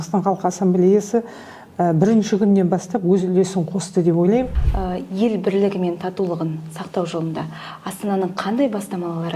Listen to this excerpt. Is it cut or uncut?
cut